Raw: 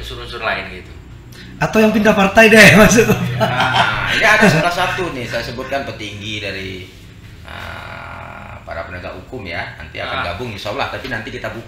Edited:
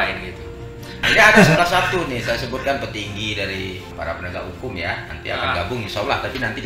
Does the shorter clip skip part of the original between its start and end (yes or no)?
yes